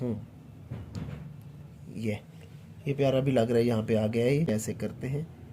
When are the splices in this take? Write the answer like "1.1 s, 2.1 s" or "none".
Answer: 4.5 s